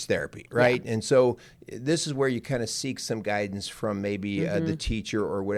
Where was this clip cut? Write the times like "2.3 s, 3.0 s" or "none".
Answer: none